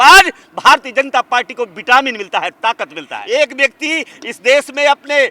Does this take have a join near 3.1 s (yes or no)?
yes